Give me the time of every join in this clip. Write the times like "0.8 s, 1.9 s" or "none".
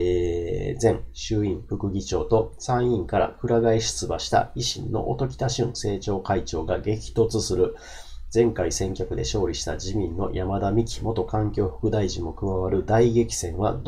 none